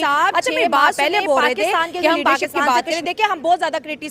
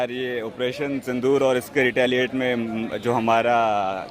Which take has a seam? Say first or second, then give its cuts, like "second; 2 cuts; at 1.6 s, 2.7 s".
first; 1 cut; at 2.5 s